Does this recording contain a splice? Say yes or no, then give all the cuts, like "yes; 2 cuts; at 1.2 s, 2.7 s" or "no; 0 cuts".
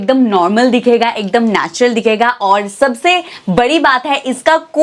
no; 0 cuts